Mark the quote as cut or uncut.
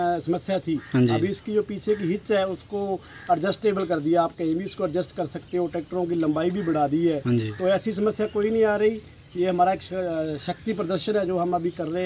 uncut